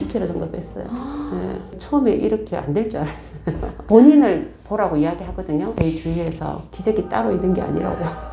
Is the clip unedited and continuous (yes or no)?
no